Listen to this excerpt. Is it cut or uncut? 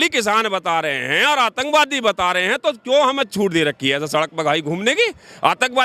uncut